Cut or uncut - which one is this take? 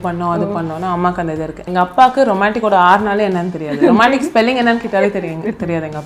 cut